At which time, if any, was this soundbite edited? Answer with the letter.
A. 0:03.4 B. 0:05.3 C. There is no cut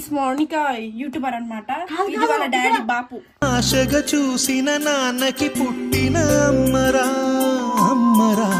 C